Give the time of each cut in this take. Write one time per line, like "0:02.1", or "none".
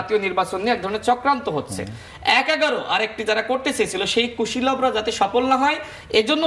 0:02.1